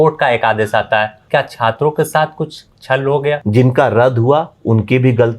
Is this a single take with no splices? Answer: no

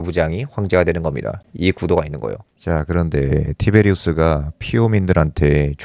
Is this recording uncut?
no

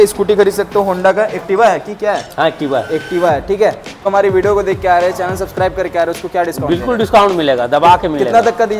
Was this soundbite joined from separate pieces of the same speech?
yes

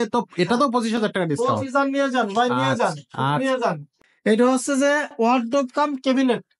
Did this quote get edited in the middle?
yes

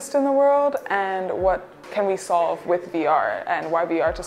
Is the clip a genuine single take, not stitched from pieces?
no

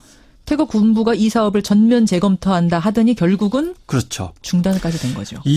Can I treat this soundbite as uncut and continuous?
no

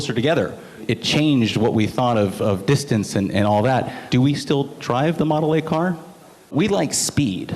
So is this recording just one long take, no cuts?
no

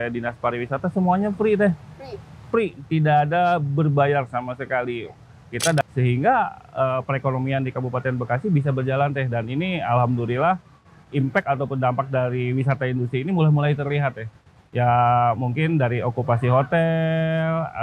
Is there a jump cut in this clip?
yes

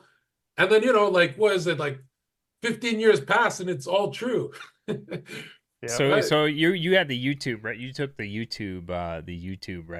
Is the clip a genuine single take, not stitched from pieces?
yes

